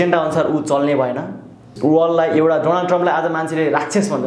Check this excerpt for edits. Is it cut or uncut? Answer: cut